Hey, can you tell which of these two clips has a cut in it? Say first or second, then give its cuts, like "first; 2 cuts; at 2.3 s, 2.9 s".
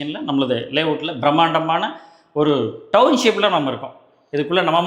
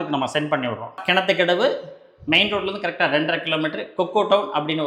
second; 1 cut; at 1.0 s